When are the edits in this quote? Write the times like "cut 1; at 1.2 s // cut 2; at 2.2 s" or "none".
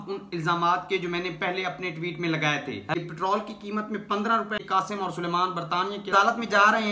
cut 1; at 2.9 s // cut 2; at 4.6 s